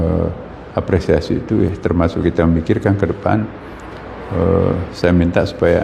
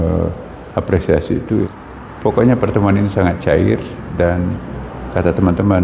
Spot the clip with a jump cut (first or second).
second